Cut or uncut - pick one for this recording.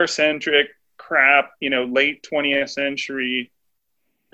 uncut